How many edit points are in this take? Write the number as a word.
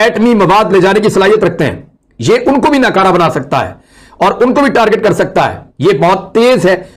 zero